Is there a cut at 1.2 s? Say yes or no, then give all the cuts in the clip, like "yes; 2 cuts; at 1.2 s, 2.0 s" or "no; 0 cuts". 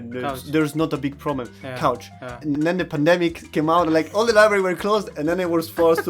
no; 2 cuts; at 2.5 s, 3.4 s